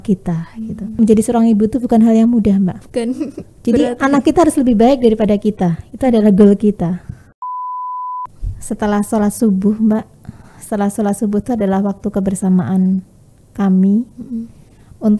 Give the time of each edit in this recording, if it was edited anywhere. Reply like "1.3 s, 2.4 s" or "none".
1.0 s, 7.7 s